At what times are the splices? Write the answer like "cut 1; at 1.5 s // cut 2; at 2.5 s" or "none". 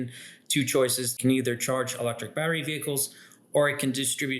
cut 1; at 1.1 s